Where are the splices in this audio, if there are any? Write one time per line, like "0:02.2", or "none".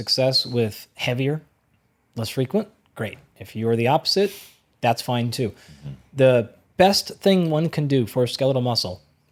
none